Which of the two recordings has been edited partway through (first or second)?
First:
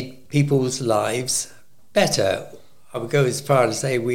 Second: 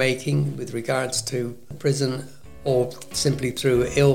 second